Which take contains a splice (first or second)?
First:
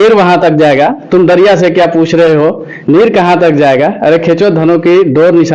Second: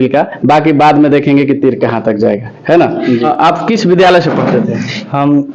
second